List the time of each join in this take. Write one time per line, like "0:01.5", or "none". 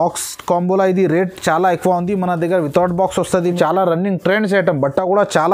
0:03.5